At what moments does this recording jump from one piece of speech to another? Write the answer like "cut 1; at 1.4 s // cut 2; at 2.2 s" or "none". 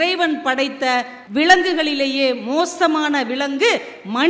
cut 1; at 1.2 s